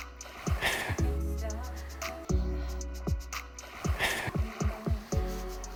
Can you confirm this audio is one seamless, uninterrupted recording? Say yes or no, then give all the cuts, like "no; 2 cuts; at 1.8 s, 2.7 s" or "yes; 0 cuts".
yes; 0 cuts